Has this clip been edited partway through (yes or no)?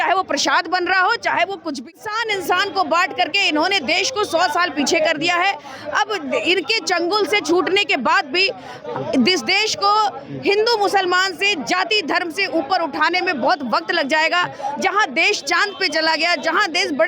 yes